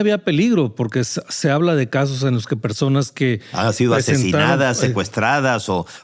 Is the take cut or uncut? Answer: uncut